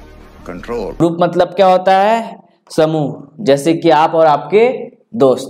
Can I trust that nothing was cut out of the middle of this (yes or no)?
no